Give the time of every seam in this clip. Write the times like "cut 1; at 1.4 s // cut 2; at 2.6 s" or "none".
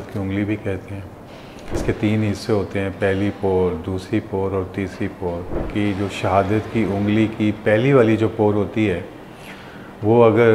cut 1; at 1.8 s // cut 2; at 5.5 s